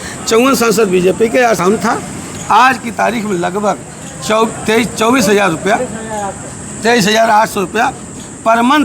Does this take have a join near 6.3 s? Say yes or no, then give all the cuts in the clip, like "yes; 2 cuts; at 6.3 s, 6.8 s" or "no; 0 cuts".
no; 1 cut; at 1.6 s